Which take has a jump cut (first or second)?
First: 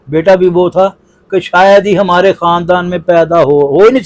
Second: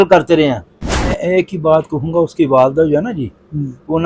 second